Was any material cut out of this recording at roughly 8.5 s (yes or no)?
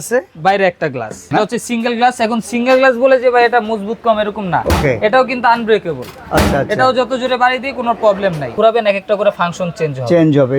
yes